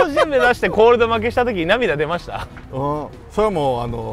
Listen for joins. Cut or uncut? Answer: uncut